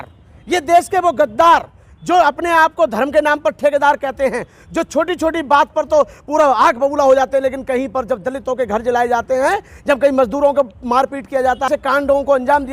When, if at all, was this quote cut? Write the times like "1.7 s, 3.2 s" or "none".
11.7 s